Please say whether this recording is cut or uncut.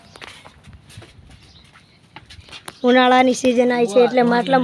uncut